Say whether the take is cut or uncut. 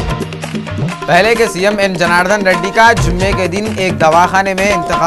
cut